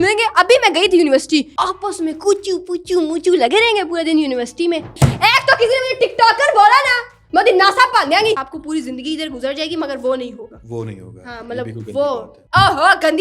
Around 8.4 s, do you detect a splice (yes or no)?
yes